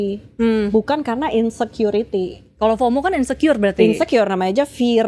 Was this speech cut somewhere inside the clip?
no; 0 cuts

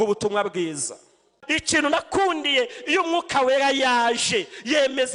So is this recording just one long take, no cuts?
no; 1 cut; at 1.4 s

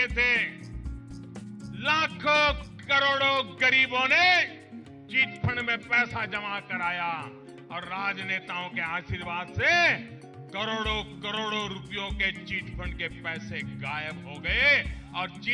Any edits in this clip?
no; 0 cuts

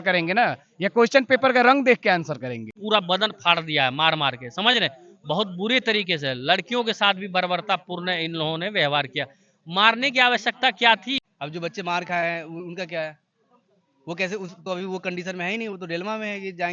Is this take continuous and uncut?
no; 2 cuts; at 2.7 s, 11.2 s

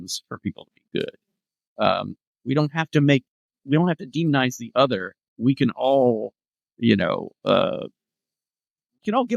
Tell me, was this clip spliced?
no; 0 cuts

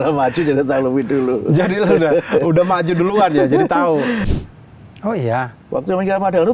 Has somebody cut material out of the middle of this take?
yes; 1 cut; at 4.3 s

